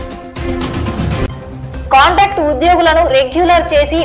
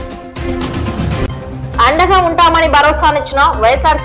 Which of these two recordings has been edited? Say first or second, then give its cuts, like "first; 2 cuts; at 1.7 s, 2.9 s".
second; 1 cut; at 1.3 s